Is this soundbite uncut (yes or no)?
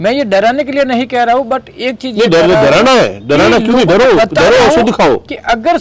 yes